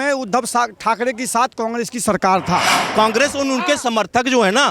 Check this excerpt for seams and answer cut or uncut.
cut